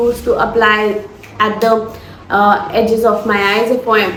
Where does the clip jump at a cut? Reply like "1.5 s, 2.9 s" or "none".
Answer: none